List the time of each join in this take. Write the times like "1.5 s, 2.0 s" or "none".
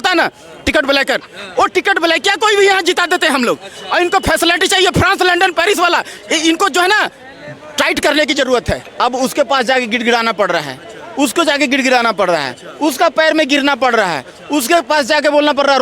8.8 s